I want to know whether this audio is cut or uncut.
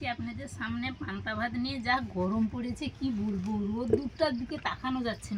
uncut